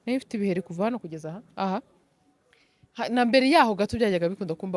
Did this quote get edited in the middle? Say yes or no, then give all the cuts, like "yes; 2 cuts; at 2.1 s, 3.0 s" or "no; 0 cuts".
no; 0 cuts